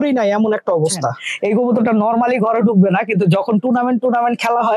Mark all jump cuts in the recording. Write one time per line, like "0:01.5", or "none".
0:01.3